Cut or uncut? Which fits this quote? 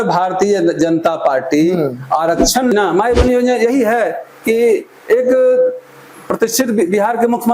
cut